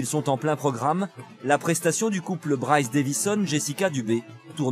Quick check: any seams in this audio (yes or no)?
no